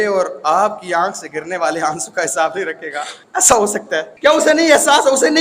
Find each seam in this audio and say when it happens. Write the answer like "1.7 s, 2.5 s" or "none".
3.2 s, 4.1 s